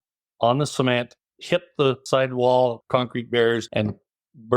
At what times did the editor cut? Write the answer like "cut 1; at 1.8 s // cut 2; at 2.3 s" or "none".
cut 1; at 2.0 s // cut 2; at 2.8 s // cut 3; at 3.7 s